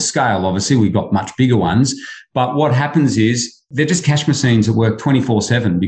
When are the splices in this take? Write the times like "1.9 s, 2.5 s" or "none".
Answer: none